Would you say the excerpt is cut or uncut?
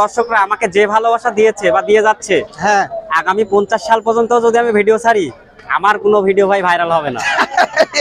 uncut